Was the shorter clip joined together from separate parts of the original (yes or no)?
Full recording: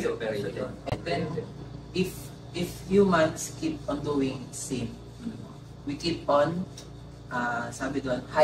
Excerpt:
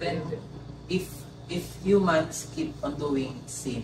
no